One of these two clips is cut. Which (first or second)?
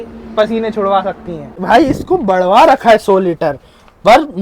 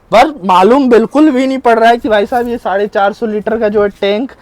first